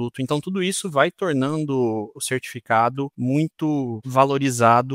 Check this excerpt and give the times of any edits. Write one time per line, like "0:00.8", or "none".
0:02.2
0:03.1
0:04.0